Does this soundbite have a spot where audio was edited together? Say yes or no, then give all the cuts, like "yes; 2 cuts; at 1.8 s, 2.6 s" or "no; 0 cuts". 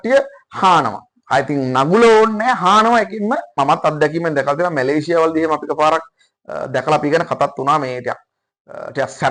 yes; 1 cut; at 3.5 s